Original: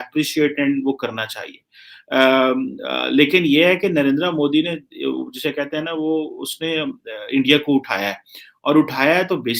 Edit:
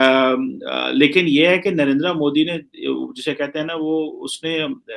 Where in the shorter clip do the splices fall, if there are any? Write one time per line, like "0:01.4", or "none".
none

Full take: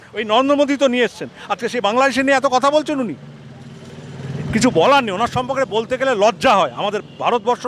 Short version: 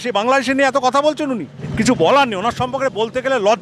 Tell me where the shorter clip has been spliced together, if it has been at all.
0:01.6

